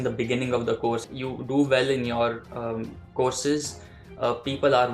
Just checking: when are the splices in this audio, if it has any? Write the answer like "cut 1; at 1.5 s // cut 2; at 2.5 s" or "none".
cut 1; at 1.1 s